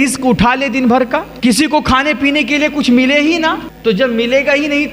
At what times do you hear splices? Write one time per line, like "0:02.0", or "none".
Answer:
0:01.3
0:03.7